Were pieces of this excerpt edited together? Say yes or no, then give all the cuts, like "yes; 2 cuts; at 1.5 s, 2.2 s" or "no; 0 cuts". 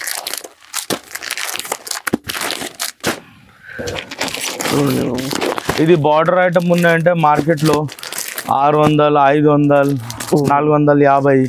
no; 0 cuts